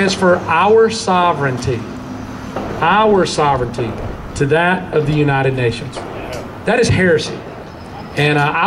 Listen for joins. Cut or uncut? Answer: uncut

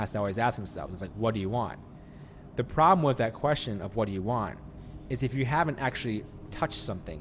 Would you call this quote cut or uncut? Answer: uncut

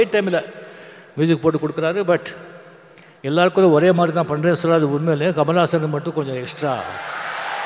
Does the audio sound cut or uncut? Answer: uncut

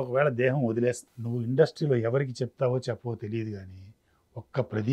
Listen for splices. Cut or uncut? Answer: cut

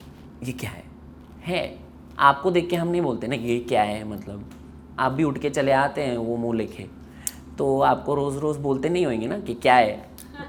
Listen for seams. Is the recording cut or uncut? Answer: uncut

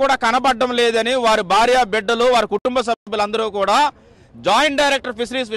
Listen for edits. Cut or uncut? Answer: uncut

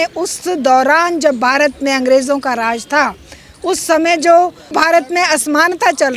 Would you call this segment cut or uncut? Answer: cut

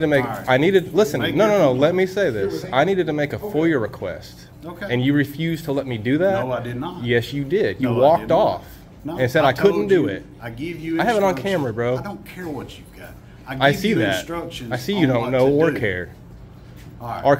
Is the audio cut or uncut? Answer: uncut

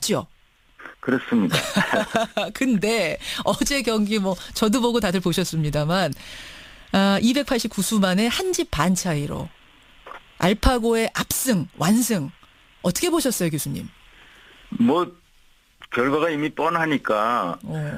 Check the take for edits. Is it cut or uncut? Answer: uncut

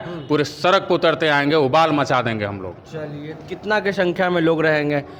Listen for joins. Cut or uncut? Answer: uncut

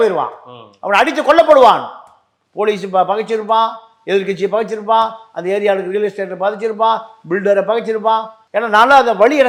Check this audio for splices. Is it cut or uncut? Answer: uncut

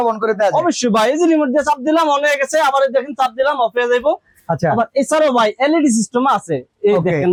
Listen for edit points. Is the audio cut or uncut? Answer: uncut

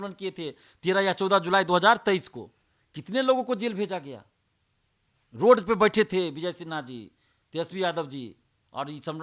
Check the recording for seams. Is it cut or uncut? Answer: uncut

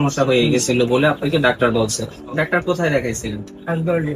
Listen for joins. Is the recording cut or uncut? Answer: uncut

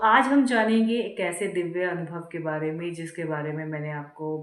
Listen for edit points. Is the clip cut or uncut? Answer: uncut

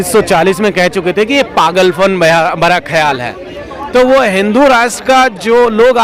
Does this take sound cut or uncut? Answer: uncut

